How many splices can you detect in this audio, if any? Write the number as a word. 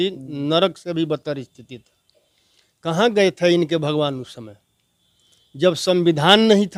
zero